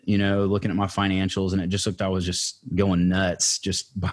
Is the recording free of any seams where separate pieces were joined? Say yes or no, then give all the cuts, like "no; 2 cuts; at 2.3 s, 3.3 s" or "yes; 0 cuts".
yes; 0 cuts